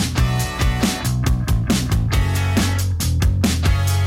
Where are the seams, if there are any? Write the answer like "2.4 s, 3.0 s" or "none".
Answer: 1.1 s